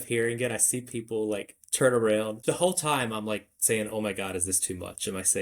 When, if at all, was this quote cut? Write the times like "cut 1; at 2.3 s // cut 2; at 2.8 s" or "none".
cut 1; at 2.4 s